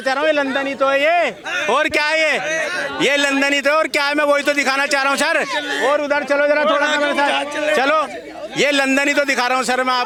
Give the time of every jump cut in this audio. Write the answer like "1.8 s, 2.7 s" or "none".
none